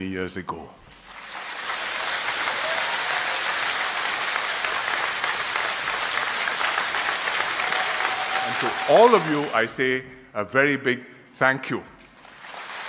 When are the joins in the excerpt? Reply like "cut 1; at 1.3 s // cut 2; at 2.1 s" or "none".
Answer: cut 1; at 8.8 s